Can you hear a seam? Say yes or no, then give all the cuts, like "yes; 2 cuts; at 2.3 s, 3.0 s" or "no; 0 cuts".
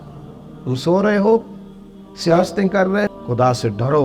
yes; 1 cut; at 3.1 s